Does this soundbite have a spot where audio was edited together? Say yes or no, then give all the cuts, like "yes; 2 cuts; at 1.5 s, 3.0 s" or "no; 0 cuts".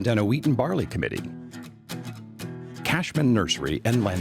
yes; 2 cuts; at 1.2 s, 2.9 s